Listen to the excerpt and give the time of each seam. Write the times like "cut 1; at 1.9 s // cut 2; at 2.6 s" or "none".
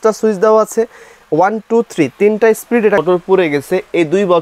cut 1; at 3.0 s